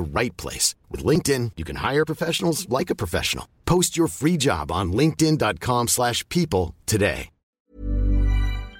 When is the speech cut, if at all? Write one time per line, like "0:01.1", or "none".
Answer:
0:07.7